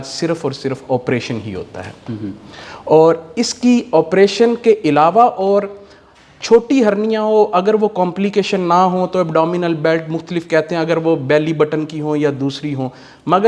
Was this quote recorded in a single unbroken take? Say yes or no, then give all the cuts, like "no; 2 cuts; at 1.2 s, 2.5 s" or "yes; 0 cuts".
yes; 0 cuts